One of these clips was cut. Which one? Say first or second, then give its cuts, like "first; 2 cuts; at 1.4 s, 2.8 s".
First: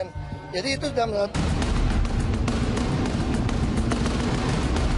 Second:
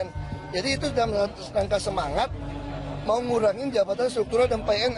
second; 1 cut; at 1.3 s